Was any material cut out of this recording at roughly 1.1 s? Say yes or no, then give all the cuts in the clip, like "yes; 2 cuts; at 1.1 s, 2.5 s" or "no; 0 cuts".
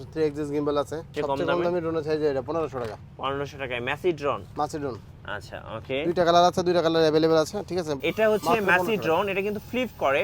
yes; 2 cuts; at 1.1 s, 8.0 s